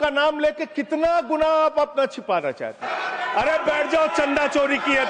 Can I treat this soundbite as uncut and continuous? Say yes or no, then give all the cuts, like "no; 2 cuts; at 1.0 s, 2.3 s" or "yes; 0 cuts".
no; 1 cut; at 2.9 s